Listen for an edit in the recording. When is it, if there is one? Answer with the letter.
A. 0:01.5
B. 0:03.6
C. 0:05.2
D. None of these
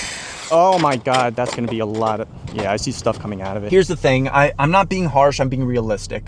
B